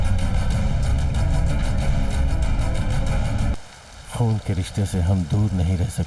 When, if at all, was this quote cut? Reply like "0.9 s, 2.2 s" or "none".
3.5 s